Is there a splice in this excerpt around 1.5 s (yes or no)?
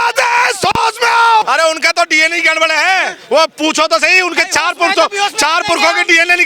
yes